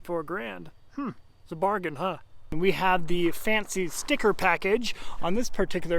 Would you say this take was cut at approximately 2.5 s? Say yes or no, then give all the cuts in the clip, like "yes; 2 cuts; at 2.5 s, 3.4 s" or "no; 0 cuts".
yes; 1 cut; at 2.5 s